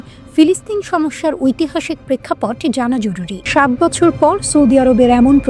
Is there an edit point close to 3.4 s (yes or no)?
yes